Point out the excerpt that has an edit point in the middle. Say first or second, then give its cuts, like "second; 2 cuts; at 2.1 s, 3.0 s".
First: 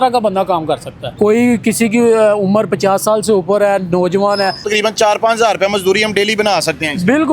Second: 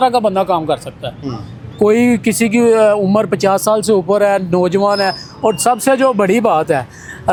first; 2 cuts; at 1.0 s, 4.7 s